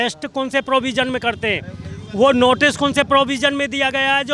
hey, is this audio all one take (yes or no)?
yes